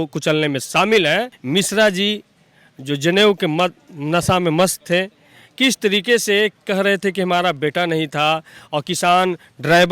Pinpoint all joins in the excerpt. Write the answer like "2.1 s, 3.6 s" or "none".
1.3 s